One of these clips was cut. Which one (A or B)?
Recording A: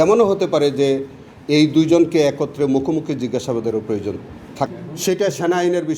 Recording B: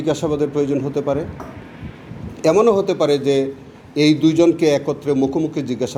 A